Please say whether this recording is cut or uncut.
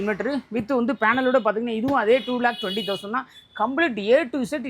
uncut